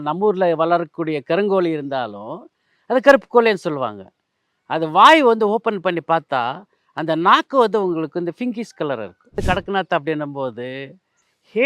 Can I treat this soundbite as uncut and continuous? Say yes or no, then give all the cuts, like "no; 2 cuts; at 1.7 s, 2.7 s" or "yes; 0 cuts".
no; 1 cut; at 9.4 s